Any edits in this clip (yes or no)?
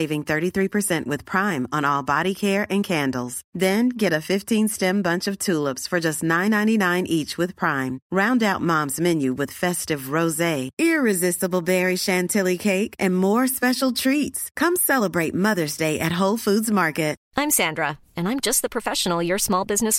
yes